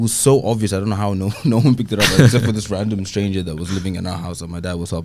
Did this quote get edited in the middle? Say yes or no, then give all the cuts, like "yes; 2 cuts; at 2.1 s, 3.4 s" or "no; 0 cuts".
no; 0 cuts